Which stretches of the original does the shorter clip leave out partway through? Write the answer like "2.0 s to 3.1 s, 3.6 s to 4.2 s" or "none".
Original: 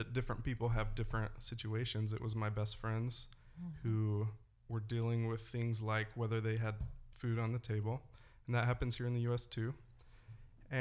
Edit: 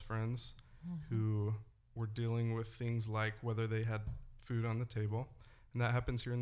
none